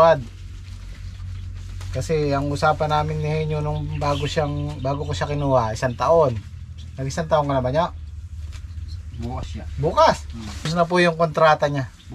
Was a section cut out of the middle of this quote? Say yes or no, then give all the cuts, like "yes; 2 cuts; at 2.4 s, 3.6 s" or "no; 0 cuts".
yes; 1 cut; at 10.6 s